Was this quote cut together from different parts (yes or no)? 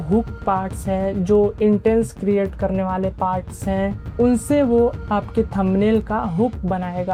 no